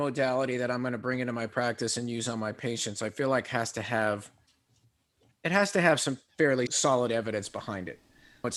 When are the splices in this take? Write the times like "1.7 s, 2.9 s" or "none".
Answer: none